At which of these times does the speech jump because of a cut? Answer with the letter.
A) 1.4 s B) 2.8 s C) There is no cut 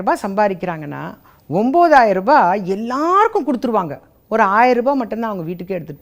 C